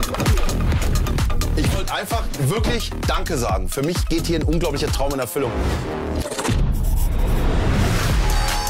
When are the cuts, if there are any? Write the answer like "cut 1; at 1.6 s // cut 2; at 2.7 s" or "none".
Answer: none